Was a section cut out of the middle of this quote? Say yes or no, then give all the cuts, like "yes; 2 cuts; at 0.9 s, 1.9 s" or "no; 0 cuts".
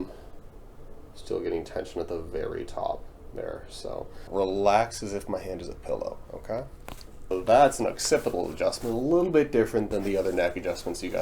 yes; 2 cuts; at 4.3 s, 7.3 s